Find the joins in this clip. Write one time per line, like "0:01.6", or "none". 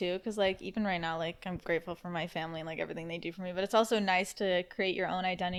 none